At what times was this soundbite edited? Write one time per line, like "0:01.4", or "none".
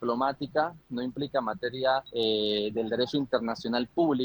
0:02.1